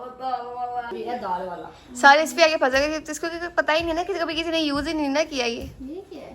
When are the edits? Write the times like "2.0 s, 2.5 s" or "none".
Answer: 0.9 s